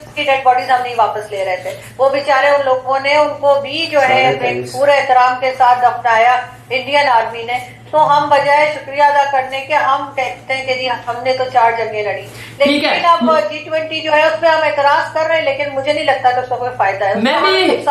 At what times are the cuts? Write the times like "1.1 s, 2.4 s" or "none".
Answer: none